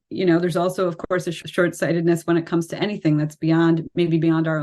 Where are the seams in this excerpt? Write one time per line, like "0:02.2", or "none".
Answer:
0:01.4

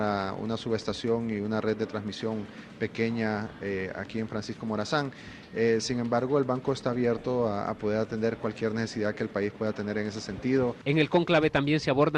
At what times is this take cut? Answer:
0:04.5

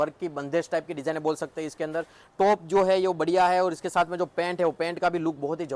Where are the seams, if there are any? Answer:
none

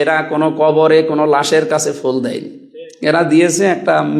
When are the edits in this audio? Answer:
none

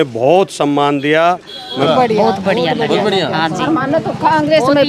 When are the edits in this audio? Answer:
0:01.8

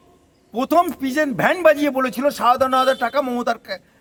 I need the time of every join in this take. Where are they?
none

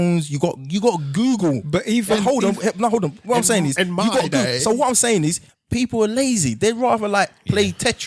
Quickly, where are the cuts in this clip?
0:05.5

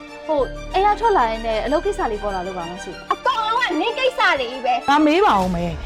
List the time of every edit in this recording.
0:04.9

